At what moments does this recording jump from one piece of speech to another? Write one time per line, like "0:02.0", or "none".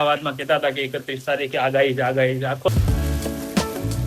0:02.7